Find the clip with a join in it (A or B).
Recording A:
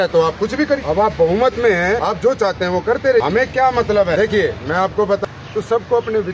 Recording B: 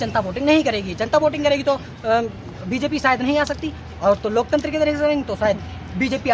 A